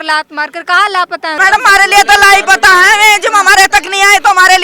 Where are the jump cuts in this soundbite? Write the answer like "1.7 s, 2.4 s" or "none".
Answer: 1.4 s